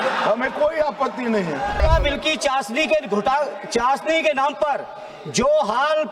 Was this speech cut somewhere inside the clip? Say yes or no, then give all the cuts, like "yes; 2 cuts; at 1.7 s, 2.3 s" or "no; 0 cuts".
yes; 1 cut; at 1.8 s